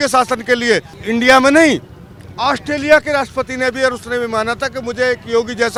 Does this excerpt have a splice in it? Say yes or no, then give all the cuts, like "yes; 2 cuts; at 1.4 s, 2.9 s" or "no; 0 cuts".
no; 0 cuts